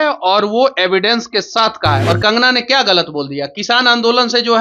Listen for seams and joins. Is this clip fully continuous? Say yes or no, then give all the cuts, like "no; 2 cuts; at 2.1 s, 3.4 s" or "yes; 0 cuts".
no; 1 cut; at 2.0 s